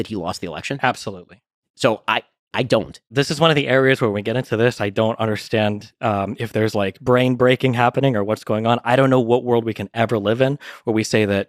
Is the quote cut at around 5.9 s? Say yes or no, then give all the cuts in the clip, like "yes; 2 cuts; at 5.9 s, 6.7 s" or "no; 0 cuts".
no; 1 cut; at 3.1 s